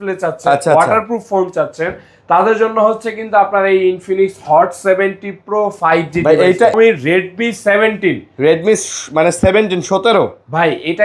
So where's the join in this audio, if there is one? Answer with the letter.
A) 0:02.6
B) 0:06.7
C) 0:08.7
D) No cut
B